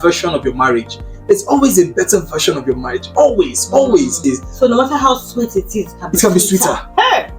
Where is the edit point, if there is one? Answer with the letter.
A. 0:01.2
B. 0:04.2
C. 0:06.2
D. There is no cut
B